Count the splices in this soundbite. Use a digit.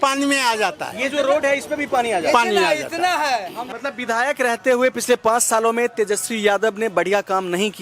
1